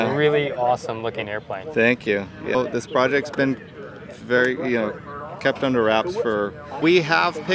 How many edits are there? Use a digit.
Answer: 2